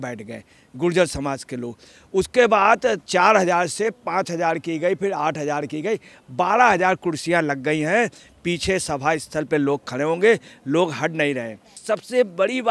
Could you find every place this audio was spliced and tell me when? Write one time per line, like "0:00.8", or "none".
0:11.8